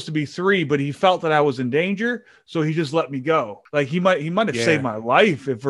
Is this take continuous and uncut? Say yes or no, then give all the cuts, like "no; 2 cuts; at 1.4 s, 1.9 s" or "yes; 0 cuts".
no; 1 cut; at 3.6 s